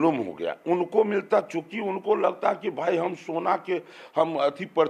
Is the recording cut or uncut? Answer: uncut